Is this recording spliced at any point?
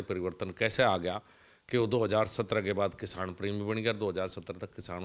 no; 0 cuts

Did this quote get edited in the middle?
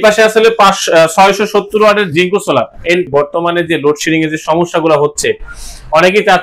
yes; 1 cut; at 3.1 s

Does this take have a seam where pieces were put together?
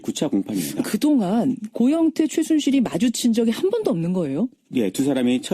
yes; 1 cut; at 2.3 s

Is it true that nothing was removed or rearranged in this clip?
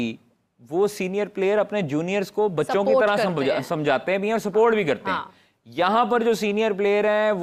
yes; 0 cuts

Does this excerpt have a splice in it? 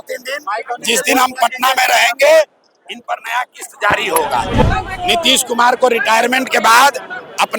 yes; 1 cut; at 4.6 s

